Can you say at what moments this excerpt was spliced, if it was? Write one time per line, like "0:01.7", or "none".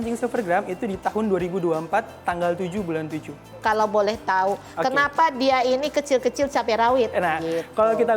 0:03.5